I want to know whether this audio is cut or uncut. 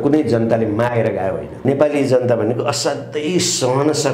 cut